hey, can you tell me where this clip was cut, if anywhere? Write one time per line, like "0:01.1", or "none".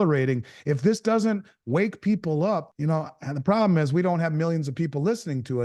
0:02.7